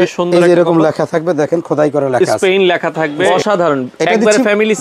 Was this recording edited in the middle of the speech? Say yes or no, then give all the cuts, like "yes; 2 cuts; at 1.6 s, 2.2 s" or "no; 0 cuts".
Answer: yes; 1 cut; at 3.2 s